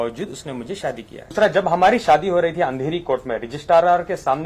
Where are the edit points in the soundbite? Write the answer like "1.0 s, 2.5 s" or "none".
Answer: 1.3 s